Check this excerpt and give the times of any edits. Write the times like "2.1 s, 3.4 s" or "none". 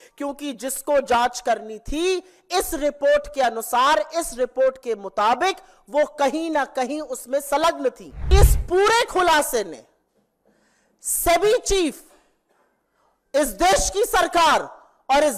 8.3 s